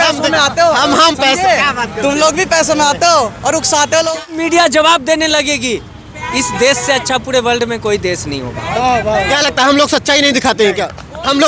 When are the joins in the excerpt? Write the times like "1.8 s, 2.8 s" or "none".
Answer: 4.7 s